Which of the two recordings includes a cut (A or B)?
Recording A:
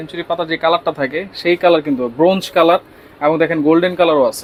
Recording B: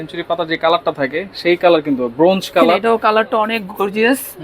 B